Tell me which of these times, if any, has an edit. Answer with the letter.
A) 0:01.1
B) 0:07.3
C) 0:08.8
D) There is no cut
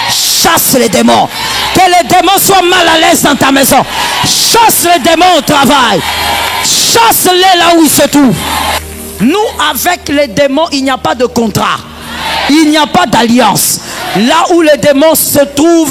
C